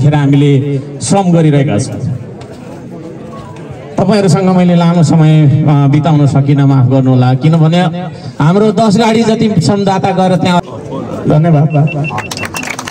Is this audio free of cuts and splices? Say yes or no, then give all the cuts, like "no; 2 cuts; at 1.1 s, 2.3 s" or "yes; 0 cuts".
no; 1 cut; at 10.6 s